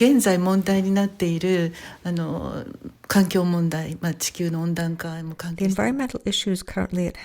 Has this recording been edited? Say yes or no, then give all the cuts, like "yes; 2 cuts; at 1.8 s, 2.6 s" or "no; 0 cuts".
yes; 1 cut; at 5.6 s